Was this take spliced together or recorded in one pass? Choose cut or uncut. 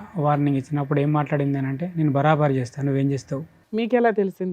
cut